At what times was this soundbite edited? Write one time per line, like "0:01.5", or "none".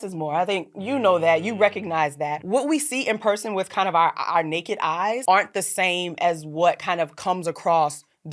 0:02.4
0:05.2